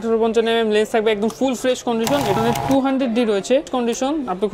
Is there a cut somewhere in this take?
yes; 2 cuts; at 2.3 s, 3.7 s

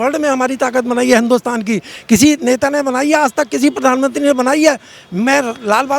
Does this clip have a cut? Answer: no; 0 cuts

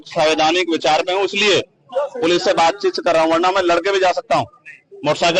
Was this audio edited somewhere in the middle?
no; 0 cuts

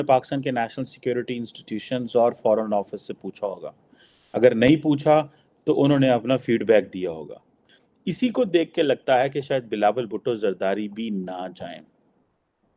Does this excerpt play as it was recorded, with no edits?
no; 1 cut; at 7.9 s

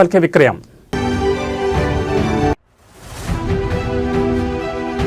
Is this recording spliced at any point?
yes; 2 cuts; at 0.9 s, 2.5 s

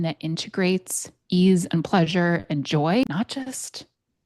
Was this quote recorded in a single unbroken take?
no; 1 cut; at 3.0 s

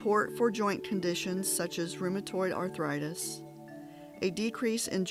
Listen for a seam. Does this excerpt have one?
no; 0 cuts

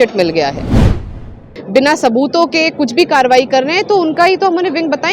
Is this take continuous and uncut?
no; 1 cut; at 1.0 s

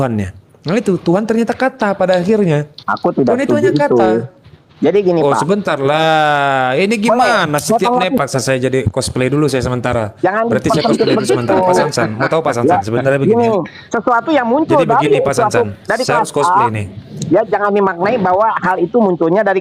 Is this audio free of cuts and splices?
no; 1 cut; at 8.2 s

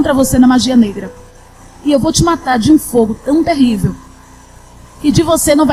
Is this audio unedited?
yes; 0 cuts

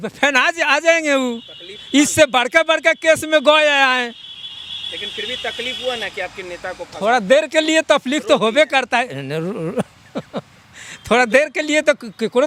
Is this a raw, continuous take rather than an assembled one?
yes; 0 cuts

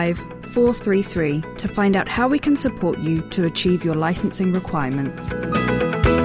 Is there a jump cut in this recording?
yes; 1 cut; at 5.3 s

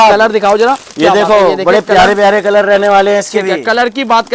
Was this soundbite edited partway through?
no; 0 cuts

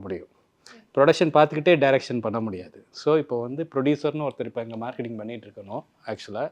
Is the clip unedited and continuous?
yes; 0 cuts

